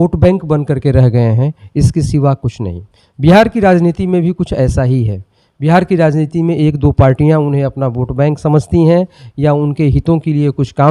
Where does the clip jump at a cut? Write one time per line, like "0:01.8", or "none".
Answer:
none